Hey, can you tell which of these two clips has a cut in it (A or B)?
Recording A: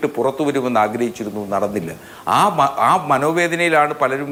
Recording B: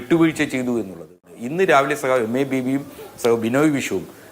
B